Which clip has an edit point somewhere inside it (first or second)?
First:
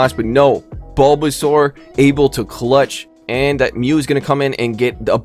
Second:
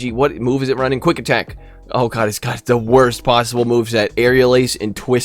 first